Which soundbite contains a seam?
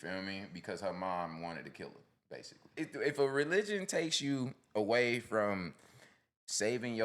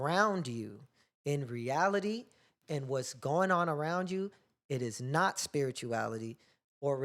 first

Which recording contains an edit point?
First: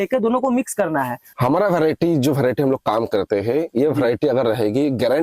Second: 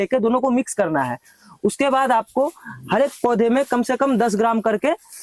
first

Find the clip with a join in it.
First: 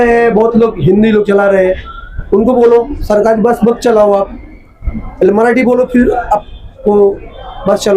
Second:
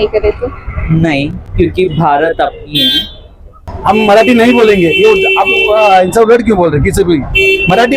second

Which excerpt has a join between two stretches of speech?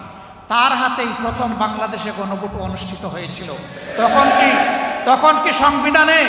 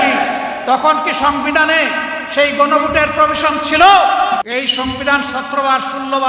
second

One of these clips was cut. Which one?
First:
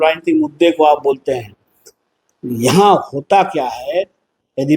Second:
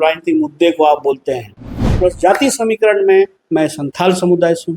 second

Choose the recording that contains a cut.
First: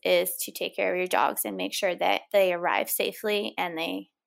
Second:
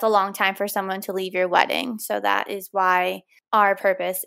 second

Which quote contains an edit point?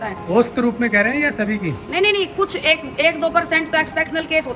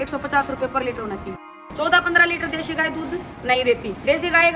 second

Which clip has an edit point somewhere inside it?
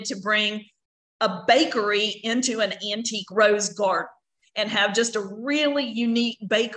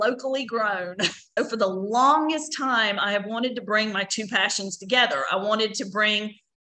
second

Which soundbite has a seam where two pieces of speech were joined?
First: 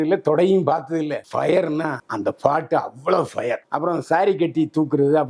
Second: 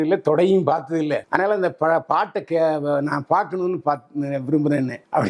first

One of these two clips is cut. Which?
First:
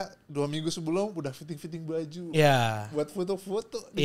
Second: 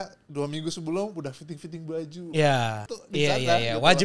second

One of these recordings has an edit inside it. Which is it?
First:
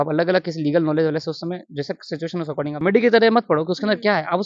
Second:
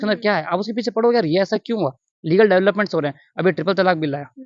first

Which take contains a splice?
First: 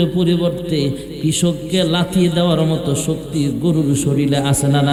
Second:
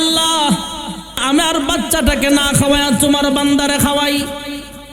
second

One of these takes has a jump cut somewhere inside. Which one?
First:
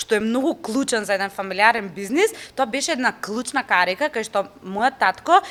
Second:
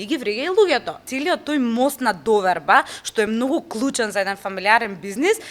second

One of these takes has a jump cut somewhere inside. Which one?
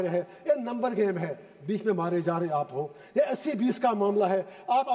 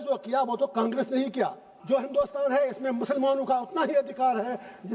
second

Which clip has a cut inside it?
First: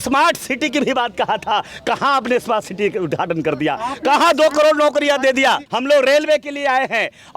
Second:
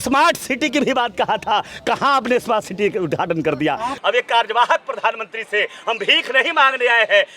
second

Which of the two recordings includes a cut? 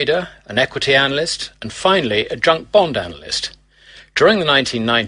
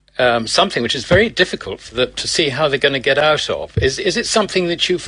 first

